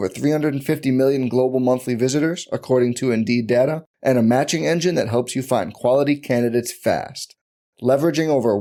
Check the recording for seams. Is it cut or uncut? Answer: uncut